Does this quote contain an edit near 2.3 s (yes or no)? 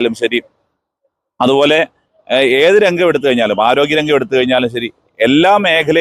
no